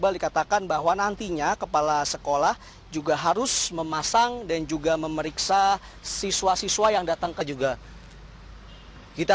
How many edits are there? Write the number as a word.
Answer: zero